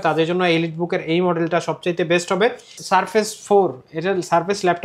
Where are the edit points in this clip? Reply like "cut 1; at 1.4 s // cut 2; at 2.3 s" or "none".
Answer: cut 1; at 2.8 s